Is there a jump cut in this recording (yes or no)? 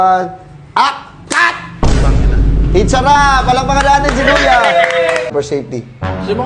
yes